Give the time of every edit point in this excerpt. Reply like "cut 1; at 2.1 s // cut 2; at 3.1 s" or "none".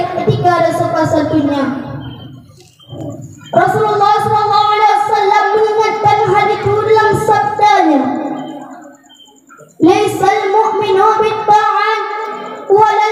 cut 1; at 2.9 s